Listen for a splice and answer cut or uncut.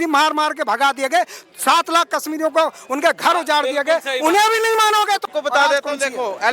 cut